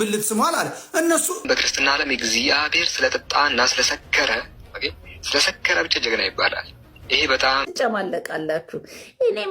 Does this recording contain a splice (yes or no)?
yes